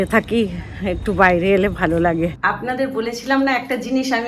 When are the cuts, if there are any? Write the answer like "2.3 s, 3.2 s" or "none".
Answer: 2.4 s

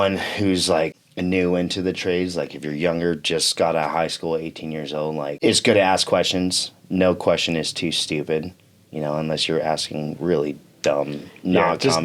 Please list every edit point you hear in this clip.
1.1 s, 5.4 s

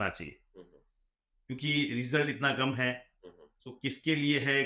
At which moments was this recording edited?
none

